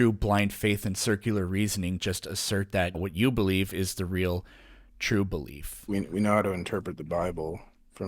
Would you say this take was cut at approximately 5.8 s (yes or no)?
yes